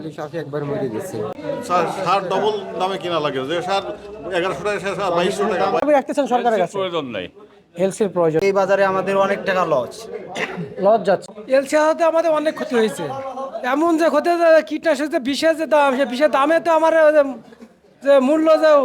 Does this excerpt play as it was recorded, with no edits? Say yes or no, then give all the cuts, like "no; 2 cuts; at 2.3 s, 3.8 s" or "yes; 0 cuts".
no; 4 cuts; at 1.3 s, 5.8 s, 8.4 s, 11.3 s